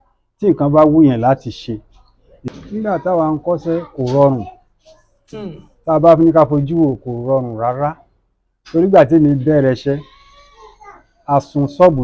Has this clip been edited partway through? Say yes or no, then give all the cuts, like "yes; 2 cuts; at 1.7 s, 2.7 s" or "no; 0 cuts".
yes; 1 cut; at 2.4 s